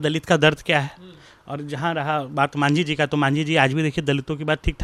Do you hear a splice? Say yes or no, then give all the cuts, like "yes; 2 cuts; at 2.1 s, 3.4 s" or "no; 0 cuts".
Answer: no; 0 cuts